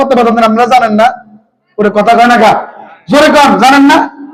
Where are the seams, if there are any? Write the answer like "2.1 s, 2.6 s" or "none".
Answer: none